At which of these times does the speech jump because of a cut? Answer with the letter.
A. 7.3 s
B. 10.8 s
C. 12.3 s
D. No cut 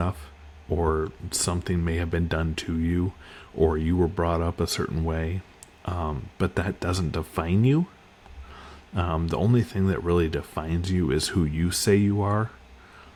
D